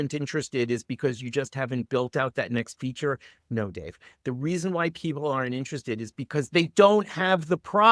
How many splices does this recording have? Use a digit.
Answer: 0